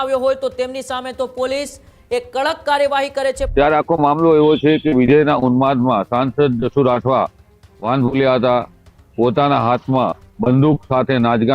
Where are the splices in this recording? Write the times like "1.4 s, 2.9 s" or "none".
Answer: 3.4 s